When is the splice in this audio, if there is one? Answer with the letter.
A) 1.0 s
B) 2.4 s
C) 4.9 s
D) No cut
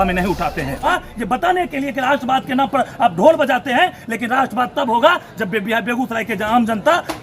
A